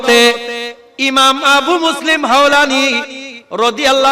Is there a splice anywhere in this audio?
no; 0 cuts

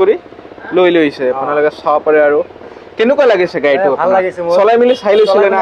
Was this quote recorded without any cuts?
yes; 0 cuts

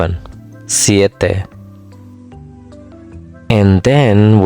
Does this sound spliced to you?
yes; 2 cuts; at 1.5 s, 3.2 s

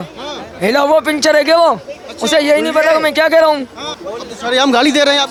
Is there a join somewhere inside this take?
no; 0 cuts

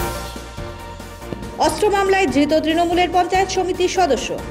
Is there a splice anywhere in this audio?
yes; 1 cut; at 1.3 s

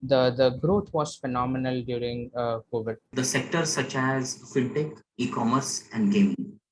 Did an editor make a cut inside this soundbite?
yes; 1 cut; at 3.0 s

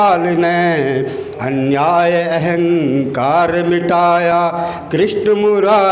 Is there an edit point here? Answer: no; 0 cuts

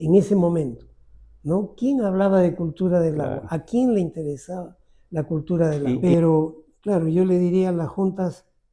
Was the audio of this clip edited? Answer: yes; 1 cut; at 6.0 s

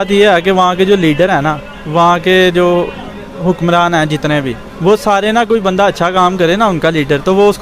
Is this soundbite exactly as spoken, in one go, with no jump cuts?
yes; 0 cuts

